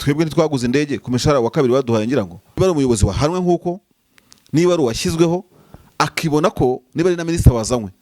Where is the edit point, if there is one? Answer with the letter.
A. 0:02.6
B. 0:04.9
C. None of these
A